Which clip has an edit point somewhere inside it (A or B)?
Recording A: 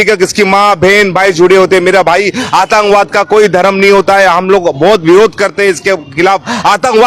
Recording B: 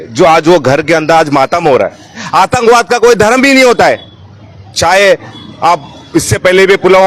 B